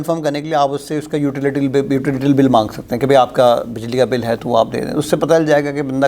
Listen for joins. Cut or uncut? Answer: uncut